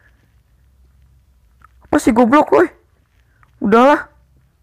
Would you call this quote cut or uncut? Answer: uncut